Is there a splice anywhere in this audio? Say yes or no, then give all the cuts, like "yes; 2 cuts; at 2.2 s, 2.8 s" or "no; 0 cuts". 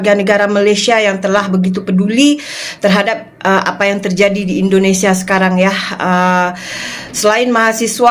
no; 0 cuts